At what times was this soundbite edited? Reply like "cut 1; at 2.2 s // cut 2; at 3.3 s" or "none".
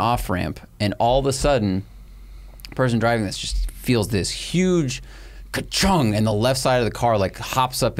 none